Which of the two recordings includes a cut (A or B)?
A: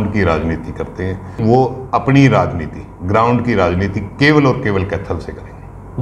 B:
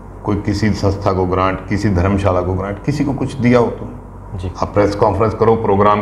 A